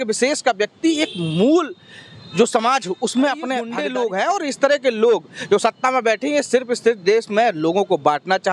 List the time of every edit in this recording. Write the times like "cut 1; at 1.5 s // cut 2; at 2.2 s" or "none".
cut 1; at 3.7 s